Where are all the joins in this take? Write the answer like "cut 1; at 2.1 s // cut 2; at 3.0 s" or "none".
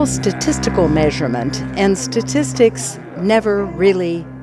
none